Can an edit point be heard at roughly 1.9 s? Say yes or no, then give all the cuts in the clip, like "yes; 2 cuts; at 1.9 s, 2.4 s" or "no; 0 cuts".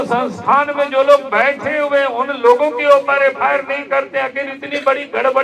no; 0 cuts